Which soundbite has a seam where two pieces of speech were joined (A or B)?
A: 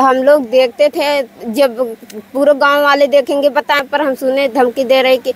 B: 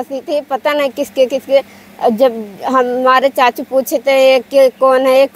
A